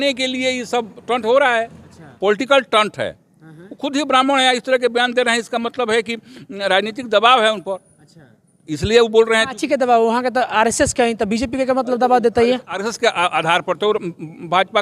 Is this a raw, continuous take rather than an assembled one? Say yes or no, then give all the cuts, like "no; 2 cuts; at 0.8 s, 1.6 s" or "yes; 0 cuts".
no; 1 cut; at 2.1 s